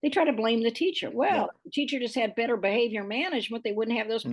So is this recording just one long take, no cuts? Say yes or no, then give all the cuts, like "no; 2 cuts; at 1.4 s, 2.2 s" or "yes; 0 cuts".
no; 1 cut; at 1.1 s